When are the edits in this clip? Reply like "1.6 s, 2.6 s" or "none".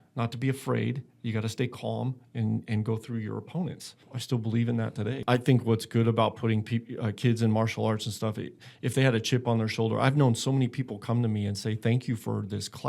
4.1 s, 5.2 s